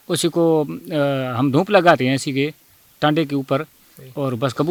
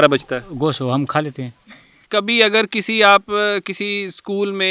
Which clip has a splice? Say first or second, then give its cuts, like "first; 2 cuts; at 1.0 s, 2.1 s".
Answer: second; 1 cut; at 2.1 s